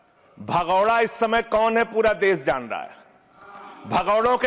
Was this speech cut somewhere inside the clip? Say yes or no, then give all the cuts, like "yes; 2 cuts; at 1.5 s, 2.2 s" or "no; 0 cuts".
no; 0 cuts